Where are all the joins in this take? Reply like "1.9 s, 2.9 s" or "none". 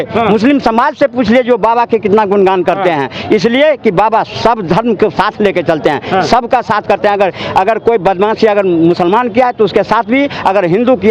none